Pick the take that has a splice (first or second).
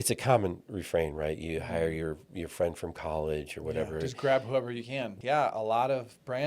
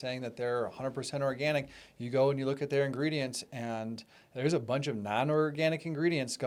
first